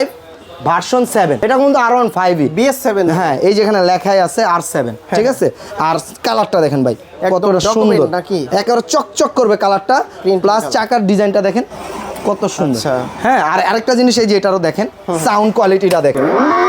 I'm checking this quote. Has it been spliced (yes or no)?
no